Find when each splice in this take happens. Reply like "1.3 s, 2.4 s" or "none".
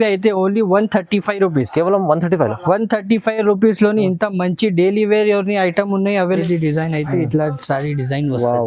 6.4 s